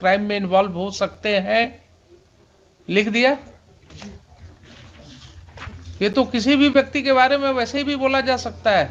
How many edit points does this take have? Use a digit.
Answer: 0